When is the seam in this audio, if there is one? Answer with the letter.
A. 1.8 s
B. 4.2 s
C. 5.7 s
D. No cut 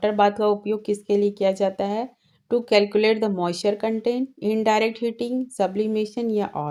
D